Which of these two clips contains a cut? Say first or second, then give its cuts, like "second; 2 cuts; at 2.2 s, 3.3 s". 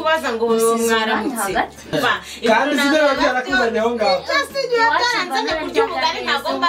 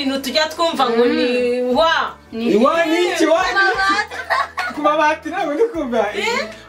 first; 1 cut; at 1.9 s